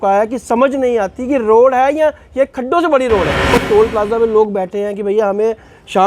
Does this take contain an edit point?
yes; 1 cut; at 3.6 s

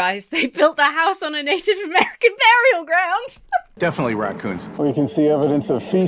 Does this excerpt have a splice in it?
yes; 1 cut; at 3.7 s

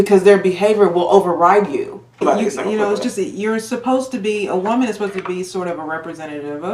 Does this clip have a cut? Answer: yes; 1 cut; at 2.2 s

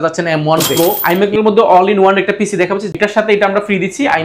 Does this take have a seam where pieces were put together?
yes; 2 cuts; at 1.0 s, 3.0 s

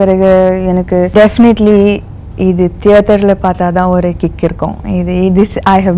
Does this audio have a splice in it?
yes; 1 cut; at 1.1 s

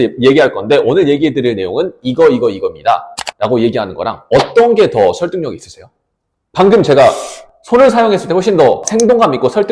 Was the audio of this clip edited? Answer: no; 0 cuts

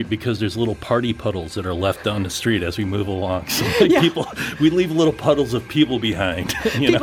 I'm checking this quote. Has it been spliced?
no; 0 cuts

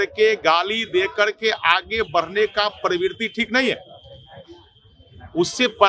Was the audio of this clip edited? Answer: no; 0 cuts

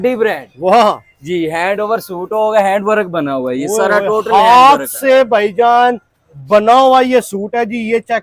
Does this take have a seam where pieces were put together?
no; 0 cuts

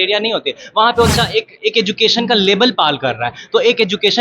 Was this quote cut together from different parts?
yes; 1 cut; at 1.1 s

